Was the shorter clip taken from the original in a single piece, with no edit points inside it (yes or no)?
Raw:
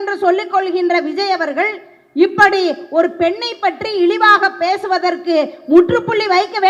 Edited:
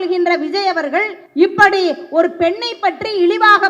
no